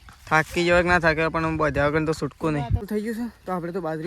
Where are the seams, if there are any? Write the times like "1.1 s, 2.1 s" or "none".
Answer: 2.9 s